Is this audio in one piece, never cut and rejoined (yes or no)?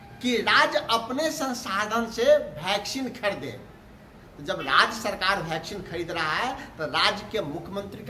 yes